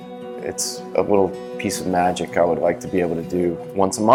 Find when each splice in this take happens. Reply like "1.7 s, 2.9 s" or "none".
none